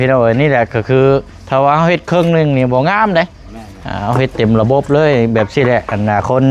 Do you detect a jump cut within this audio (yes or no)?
no